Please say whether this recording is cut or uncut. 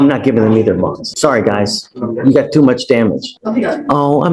cut